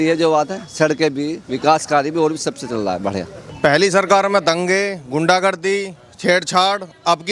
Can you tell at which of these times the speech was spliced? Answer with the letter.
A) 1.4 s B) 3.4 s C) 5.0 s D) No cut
B